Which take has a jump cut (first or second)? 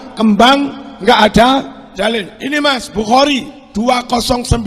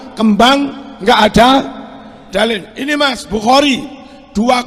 first